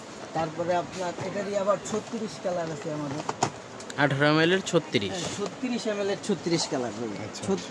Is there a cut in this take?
no; 0 cuts

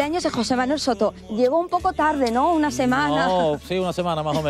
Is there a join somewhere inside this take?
yes; 1 cut; at 1.2 s

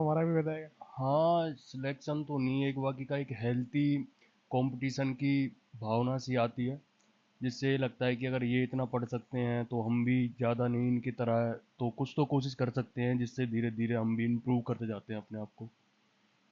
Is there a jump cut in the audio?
no; 0 cuts

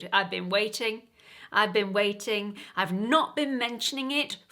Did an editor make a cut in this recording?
no; 0 cuts

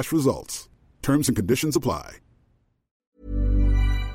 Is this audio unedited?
no; 1 cut; at 3.1 s

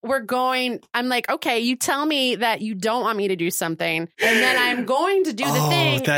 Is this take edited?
no; 0 cuts

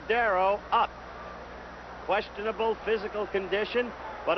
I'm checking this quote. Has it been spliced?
yes; 1 cut; at 1.1 s

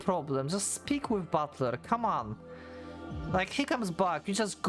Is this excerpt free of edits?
yes; 0 cuts

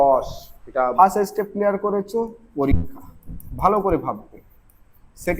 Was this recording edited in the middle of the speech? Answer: yes; 1 cut; at 0.9 s

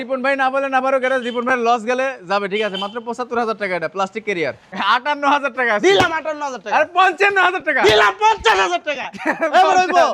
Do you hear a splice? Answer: yes; 1 cut; at 4.7 s

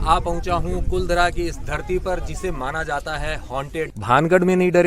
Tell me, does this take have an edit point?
yes; 1 cut; at 4.0 s

